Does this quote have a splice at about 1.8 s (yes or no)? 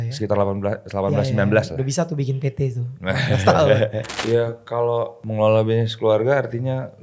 no